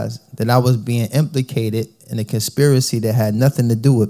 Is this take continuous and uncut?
yes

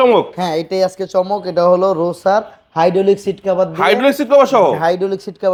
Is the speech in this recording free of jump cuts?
yes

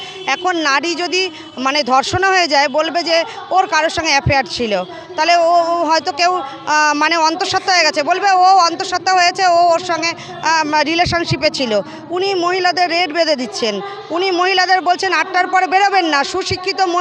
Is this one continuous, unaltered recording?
yes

